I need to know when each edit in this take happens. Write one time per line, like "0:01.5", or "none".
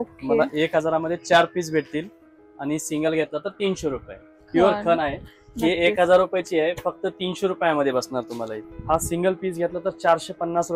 0:04.3
0:08.5